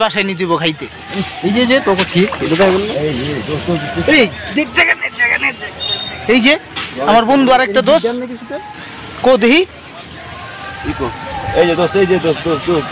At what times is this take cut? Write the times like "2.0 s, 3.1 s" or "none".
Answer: none